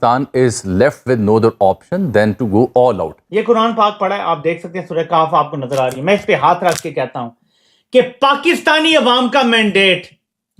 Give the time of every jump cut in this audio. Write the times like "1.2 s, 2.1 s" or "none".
3.1 s